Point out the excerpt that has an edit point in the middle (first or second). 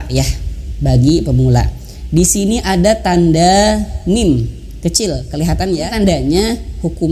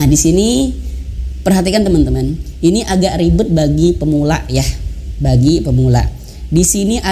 first